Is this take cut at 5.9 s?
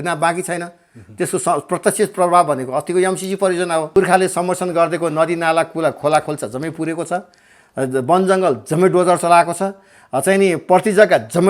no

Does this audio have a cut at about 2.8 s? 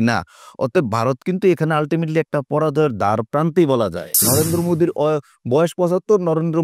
no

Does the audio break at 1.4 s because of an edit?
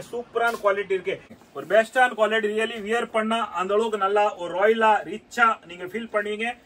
yes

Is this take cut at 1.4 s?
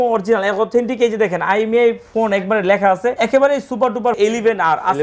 no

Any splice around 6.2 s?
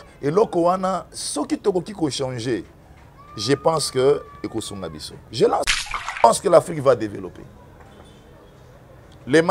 yes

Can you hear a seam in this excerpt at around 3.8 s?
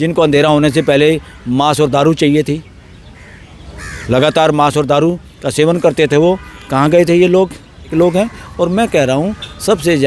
no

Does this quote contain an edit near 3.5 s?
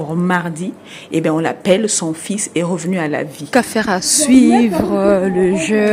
yes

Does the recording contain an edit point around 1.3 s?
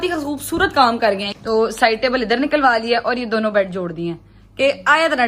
yes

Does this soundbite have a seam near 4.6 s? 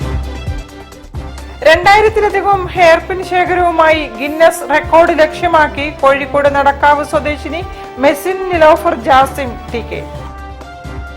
no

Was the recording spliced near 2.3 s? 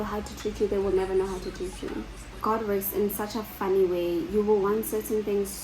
yes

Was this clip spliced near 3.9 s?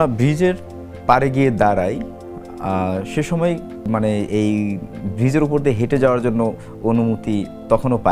yes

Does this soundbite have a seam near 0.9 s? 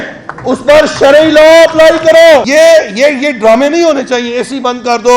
no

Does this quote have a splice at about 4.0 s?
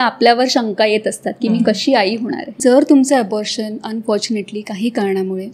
no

